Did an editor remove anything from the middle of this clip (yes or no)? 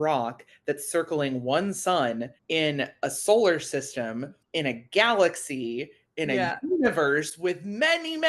no